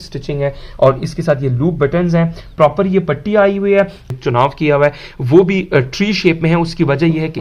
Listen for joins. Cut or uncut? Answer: cut